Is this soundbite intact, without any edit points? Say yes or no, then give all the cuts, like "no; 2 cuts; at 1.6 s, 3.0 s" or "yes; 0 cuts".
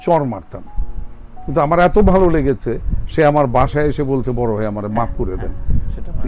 yes; 0 cuts